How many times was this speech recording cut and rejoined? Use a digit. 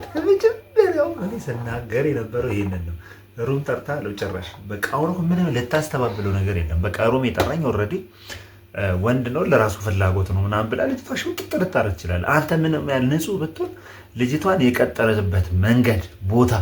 0